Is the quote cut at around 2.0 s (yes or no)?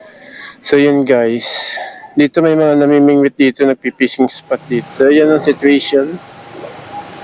no